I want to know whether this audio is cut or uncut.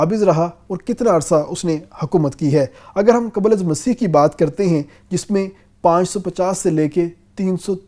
uncut